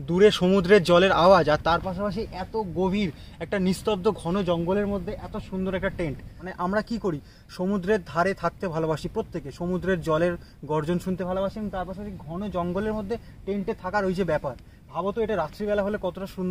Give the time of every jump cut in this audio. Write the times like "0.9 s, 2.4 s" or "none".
6.4 s